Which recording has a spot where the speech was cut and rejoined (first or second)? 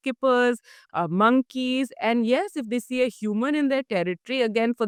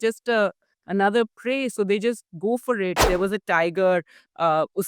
second